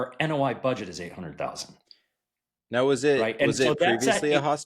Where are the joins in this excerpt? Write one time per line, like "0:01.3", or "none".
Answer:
none